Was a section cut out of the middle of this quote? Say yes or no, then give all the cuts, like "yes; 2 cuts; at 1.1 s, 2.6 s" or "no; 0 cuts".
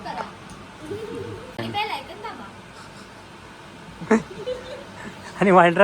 yes; 1 cut; at 1.5 s